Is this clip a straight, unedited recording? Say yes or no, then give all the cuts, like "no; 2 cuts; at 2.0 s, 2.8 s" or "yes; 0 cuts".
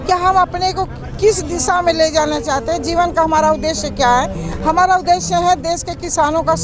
yes; 0 cuts